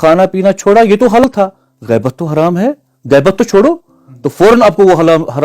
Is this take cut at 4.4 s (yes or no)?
no